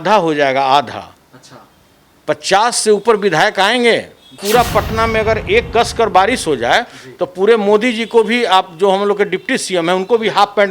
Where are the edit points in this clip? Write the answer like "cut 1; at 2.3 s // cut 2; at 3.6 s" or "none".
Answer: cut 1; at 4.4 s